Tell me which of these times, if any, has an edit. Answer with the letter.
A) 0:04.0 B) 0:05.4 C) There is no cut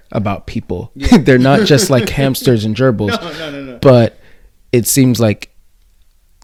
C